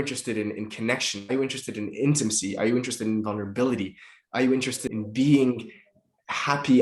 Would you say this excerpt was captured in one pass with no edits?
no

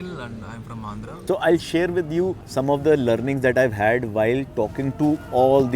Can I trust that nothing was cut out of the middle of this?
no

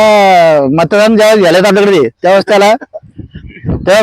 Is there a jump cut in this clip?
no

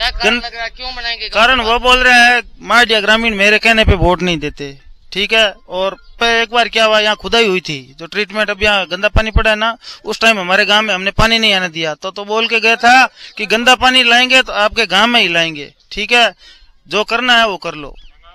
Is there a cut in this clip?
no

